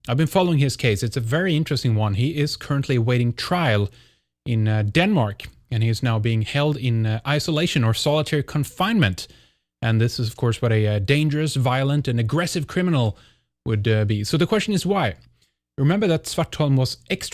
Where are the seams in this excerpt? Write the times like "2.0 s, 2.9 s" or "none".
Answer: 11.5 s